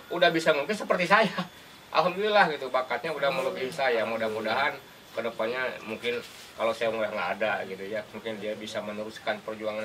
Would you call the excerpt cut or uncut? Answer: uncut